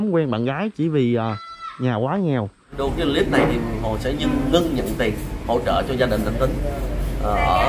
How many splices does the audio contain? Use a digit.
1